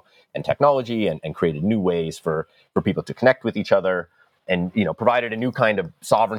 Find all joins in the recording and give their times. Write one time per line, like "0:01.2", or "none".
0:04.4